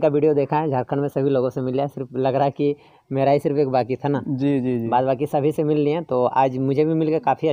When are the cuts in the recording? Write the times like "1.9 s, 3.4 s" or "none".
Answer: none